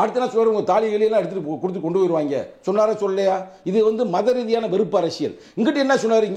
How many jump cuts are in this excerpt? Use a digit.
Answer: 0